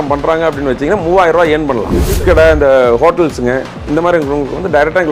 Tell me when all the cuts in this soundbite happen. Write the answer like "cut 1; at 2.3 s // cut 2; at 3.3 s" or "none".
cut 1; at 2.2 s